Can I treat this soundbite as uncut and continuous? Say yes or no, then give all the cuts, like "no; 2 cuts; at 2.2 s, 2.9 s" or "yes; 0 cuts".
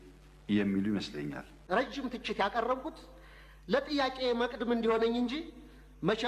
no; 1 cut; at 1.6 s